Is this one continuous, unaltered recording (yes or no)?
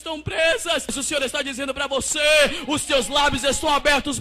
no